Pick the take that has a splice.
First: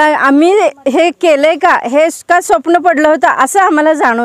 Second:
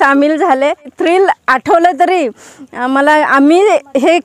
second; 1 cut; at 0.9 s

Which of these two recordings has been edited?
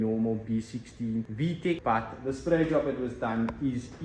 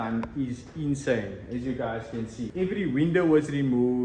first; 1 cut; at 1.8 s

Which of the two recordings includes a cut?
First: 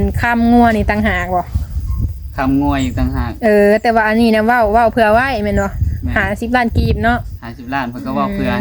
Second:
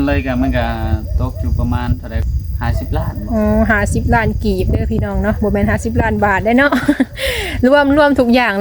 second; 1 cut; at 2.2 s

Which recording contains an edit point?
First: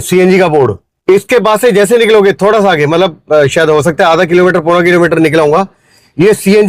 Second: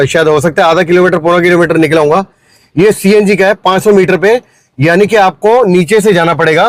first; 1 cut; at 0.9 s

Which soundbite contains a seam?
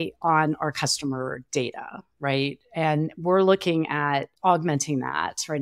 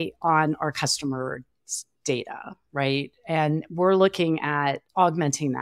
first; 1 cut; at 1.4 s

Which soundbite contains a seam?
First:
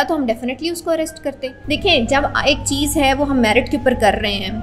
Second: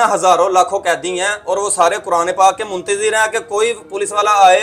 first; 1 cut; at 1.5 s

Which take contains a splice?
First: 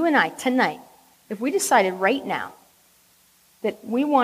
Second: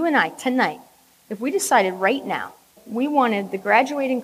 second; 1 cut; at 2.8 s

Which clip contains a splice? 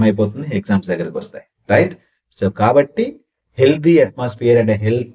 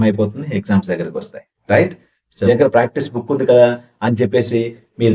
second; 1 cut; at 2.5 s

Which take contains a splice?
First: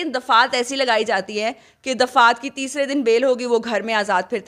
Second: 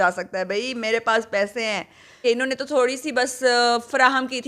second; 1 cut; at 2.2 s

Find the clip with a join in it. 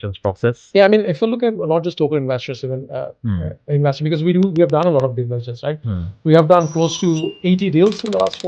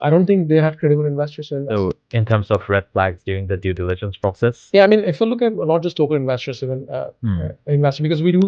second; 1 cut; at 1.7 s

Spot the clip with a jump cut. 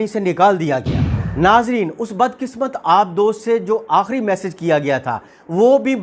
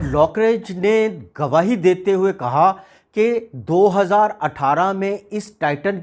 first; 1 cut; at 1.2 s

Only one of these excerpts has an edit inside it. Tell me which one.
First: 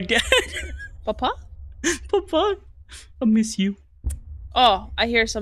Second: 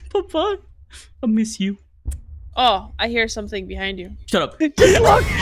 second; 1 cut; at 4.5 s

